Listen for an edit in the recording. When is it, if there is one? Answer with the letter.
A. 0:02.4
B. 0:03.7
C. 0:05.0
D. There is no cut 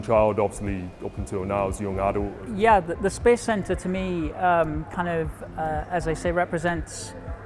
A